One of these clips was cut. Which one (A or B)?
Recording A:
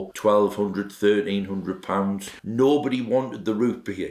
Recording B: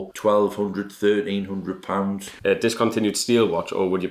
B